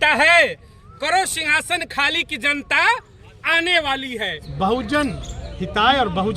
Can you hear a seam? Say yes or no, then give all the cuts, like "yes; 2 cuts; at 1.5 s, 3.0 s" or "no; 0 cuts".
yes; 1 cut; at 4.4 s